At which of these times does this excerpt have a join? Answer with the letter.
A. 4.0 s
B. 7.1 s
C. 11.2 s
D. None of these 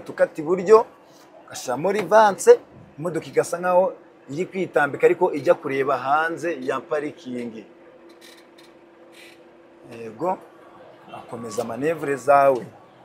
D